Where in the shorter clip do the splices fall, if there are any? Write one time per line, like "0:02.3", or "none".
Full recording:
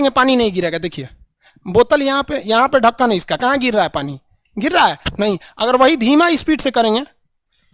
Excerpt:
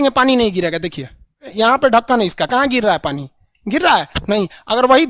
0:01.4

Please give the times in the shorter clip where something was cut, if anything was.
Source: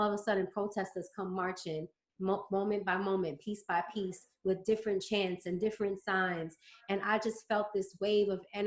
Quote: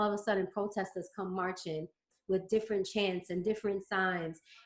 0:02.1

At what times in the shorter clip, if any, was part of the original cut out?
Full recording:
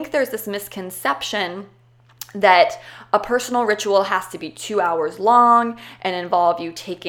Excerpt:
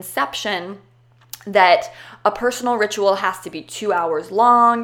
none

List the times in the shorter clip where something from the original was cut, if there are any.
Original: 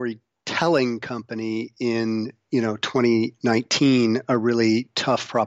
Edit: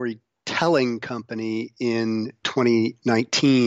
0:02.4

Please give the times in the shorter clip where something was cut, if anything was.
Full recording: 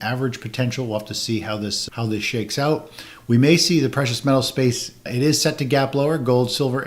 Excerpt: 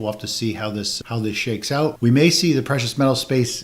0:02.0

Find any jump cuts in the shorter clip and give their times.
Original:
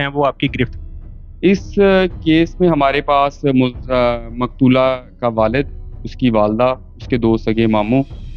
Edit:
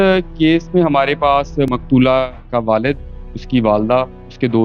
0:01.7

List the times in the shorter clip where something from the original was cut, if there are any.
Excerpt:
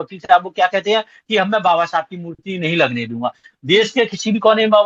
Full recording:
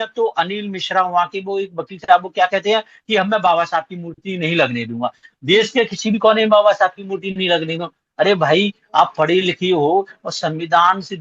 none

